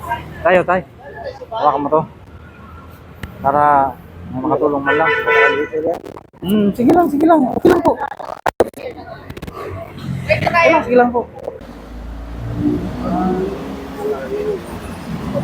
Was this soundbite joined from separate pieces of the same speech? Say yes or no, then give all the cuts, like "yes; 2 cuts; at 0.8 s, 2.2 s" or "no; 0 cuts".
yes; 1 cut; at 11.7 s